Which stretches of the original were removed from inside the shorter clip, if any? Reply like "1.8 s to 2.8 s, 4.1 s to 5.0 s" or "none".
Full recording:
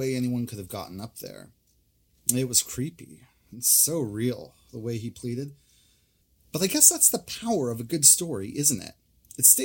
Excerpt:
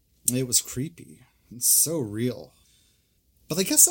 4.6 s to 5.6 s